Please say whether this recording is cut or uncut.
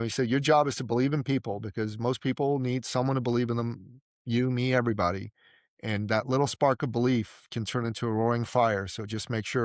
uncut